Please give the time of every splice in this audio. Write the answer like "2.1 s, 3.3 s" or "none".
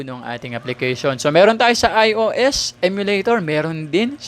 none